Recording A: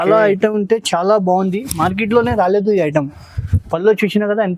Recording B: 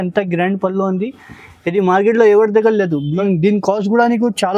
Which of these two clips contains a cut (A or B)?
B